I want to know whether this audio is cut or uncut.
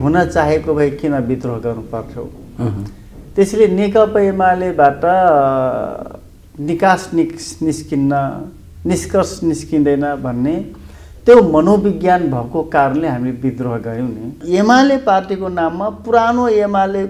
cut